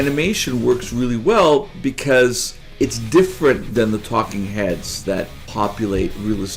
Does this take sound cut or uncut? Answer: cut